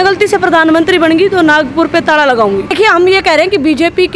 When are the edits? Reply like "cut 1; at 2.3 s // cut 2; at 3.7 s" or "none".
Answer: cut 1; at 2.7 s